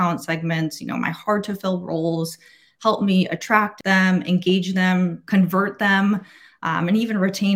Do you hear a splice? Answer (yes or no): yes